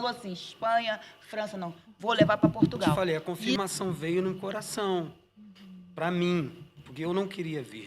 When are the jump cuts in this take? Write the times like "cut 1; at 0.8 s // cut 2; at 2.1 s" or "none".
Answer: cut 1; at 3.3 s